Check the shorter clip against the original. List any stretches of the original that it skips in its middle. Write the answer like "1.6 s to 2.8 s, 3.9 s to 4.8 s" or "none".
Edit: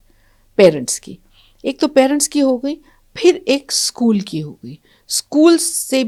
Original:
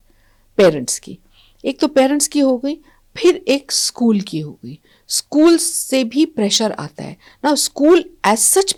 none